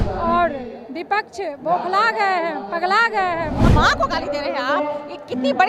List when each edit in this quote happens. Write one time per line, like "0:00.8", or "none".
0:03.7